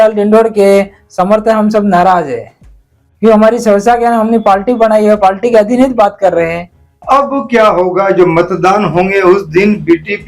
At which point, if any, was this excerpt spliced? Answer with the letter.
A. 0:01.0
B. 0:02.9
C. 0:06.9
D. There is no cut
C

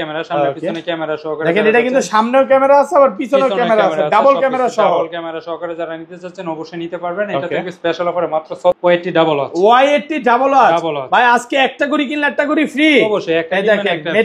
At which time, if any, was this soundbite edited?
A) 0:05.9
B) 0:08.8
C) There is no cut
B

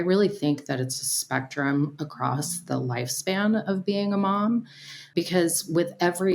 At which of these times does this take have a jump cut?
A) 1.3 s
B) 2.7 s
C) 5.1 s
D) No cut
C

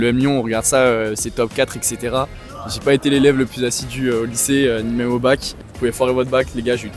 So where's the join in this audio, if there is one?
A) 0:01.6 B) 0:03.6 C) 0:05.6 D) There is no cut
C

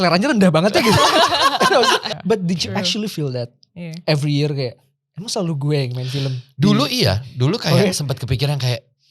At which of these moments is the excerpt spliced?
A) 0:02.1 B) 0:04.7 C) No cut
A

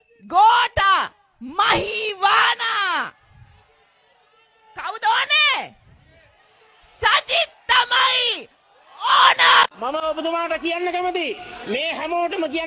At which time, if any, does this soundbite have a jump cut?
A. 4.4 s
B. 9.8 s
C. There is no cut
B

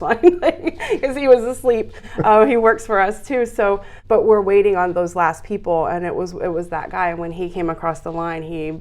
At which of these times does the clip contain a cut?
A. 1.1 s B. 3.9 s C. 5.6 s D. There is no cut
B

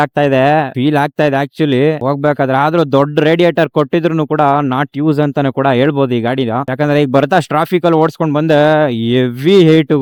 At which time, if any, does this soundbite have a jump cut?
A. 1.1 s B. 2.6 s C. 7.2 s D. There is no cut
D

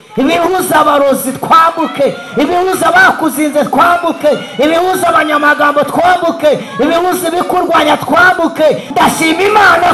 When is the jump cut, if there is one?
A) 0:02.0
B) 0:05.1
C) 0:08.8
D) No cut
C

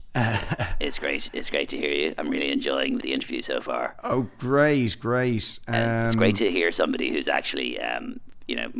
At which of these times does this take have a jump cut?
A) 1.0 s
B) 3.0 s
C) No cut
B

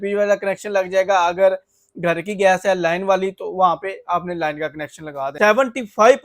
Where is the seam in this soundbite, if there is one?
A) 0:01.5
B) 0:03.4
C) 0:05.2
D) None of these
C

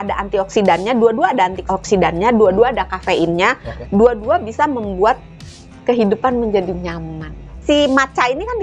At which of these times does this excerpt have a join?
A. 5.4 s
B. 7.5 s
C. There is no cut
B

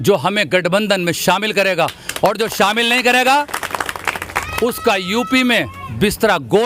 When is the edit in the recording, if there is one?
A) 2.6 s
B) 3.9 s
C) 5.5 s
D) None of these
D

